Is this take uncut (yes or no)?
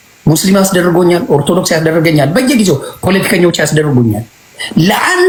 yes